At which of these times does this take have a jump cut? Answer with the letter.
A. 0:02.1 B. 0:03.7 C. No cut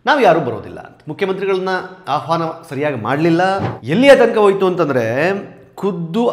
B